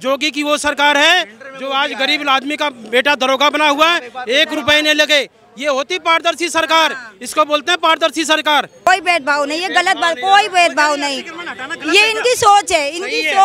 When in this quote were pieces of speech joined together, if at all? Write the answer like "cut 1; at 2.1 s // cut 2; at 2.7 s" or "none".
cut 1; at 8.9 s